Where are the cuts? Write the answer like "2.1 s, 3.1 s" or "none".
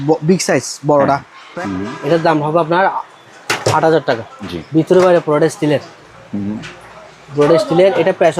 1.4 s, 4.3 s